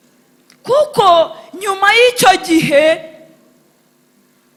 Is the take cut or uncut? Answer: uncut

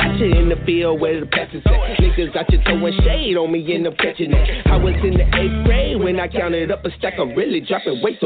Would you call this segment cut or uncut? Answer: uncut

